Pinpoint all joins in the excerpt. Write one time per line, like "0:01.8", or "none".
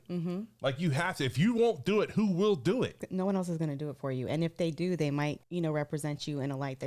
0:03.0
0:05.4